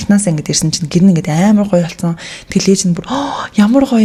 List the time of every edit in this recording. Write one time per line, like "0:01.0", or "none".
none